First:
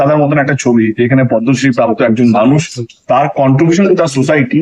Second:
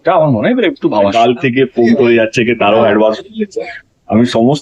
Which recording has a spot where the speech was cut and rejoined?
second; 1 cut; at 1.1 s

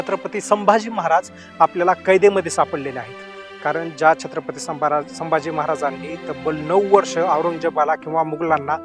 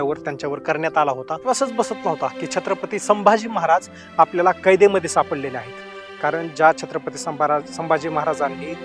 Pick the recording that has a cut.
second; 1 cut; at 1.5 s

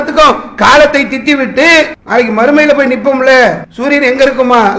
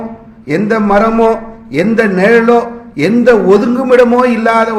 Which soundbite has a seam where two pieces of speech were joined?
first; 2 cuts; at 2.0 s, 3.7 s

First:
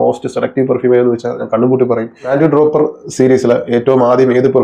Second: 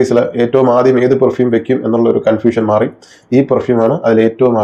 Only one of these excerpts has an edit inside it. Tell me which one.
first; 1 cut; at 2.2 s

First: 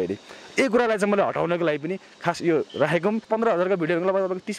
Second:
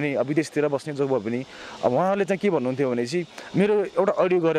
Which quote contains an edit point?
first; 1 cut; at 3.2 s

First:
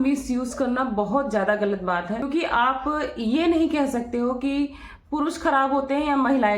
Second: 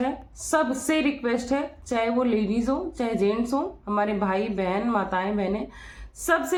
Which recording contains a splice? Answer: first; 1 cut; at 2.2 s

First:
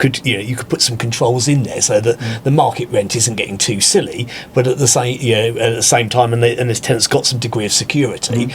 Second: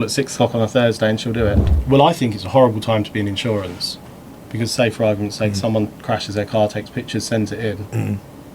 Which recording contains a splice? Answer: second; 1 cut; at 1.6 s

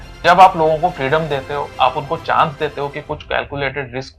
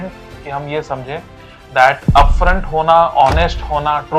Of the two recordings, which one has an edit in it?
first; 1 cut; at 1.7 s

